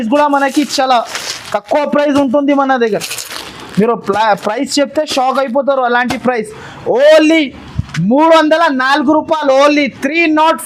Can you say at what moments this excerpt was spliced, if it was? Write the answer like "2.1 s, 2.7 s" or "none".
none